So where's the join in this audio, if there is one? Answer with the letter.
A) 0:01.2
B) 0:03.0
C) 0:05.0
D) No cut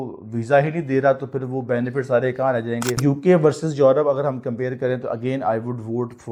B